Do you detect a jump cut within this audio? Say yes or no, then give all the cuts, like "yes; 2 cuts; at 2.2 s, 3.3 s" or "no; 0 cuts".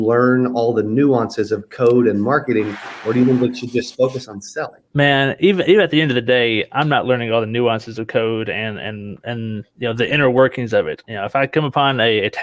yes; 1 cut; at 4.8 s